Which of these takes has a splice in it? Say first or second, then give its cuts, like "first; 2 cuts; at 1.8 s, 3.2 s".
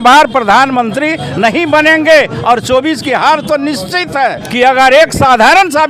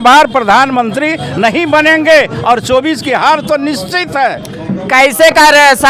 first; 1 cut; at 4.4 s